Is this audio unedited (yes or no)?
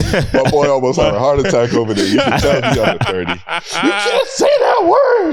yes